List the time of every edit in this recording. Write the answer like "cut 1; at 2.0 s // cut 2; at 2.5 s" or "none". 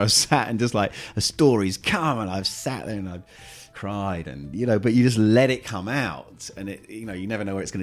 cut 1; at 3.7 s